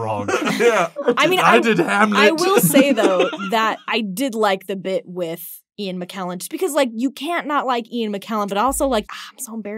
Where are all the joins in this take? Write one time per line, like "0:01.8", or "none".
0:00.9
0:03.8
0:09.1